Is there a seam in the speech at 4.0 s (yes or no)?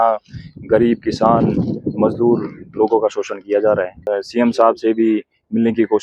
yes